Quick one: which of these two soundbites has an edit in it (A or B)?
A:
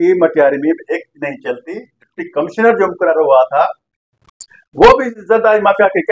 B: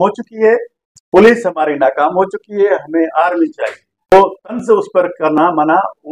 B